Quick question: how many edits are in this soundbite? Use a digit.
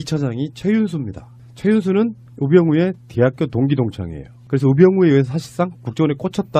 1